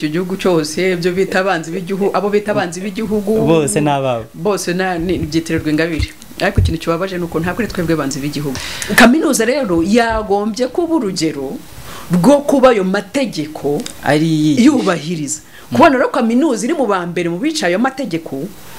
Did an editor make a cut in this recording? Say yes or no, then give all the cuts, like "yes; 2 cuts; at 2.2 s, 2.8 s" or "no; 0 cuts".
yes; 1 cut; at 8.5 s